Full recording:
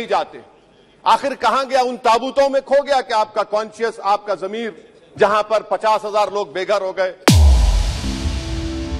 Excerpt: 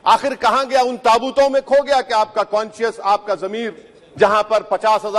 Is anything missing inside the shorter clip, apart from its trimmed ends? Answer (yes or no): no